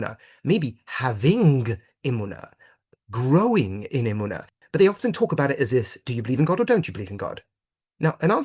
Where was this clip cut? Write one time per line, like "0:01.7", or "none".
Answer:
0:04.5